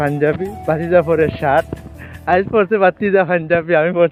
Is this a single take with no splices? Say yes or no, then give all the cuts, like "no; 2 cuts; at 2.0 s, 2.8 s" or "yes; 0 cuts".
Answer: yes; 0 cuts